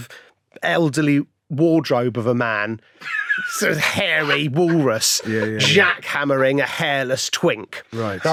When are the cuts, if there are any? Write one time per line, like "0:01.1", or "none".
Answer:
none